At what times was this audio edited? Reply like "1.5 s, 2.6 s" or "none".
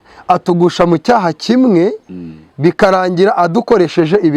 none